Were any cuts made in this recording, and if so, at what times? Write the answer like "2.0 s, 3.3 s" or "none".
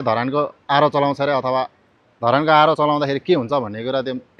none